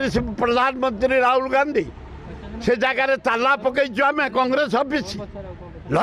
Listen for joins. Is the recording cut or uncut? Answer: uncut